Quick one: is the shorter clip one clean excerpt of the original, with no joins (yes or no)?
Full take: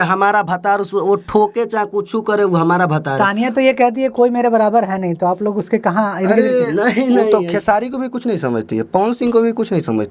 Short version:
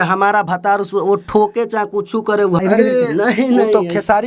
no